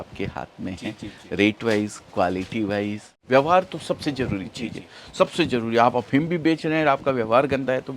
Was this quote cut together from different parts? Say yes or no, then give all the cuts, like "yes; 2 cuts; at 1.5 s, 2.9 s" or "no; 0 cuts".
yes; 1 cut; at 3.2 s